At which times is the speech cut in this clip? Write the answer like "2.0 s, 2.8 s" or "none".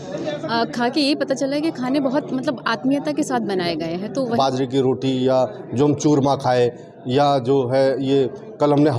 4.4 s